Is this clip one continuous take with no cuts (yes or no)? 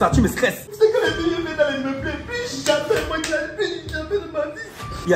yes